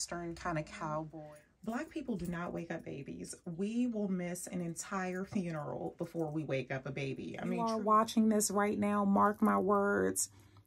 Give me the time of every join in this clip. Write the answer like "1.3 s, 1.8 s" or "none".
1.1 s, 7.6 s